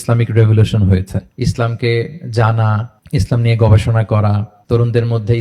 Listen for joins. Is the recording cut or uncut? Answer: cut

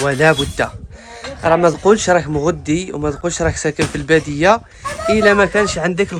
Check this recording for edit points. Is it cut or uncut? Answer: uncut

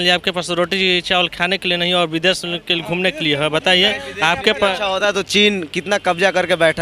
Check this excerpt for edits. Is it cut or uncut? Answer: uncut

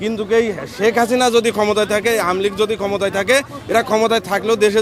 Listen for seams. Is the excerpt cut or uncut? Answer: uncut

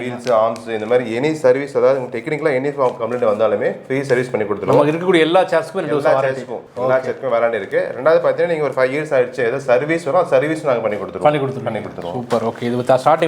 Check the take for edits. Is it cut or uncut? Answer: uncut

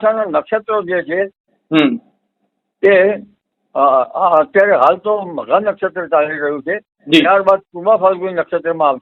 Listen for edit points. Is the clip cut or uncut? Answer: uncut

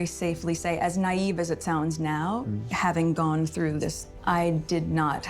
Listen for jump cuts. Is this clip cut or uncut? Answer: cut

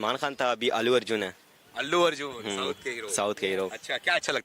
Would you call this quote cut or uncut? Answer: cut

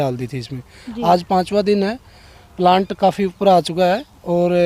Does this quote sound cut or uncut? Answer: uncut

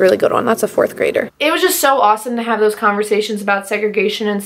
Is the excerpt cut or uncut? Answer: cut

